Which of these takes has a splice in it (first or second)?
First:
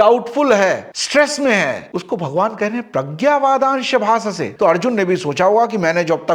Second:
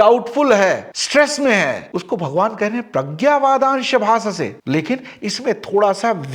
first